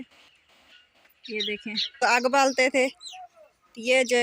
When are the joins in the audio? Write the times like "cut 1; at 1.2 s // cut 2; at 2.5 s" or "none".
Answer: cut 1; at 2.0 s

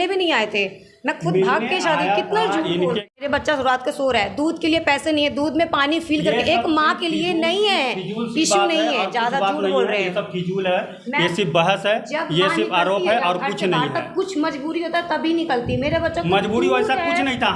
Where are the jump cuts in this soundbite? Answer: cut 1; at 3.1 s

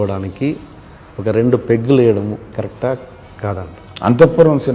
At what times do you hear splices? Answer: cut 1; at 3.8 s

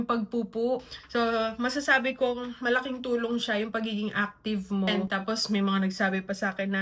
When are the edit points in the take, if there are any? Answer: cut 1; at 0.9 s // cut 2; at 5.0 s

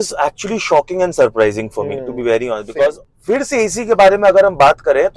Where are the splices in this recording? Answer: cut 1; at 3.1 s

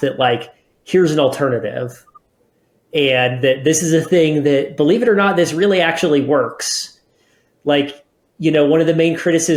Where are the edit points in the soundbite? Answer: none

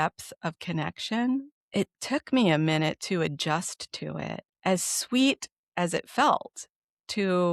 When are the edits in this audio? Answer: cut 1; at 1.6 s // cut 2; at 4.5 s

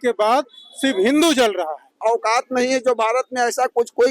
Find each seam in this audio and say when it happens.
cut 1; at 1.9 s

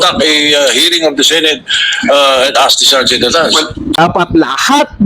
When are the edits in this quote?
cut 1; at 4.0 s

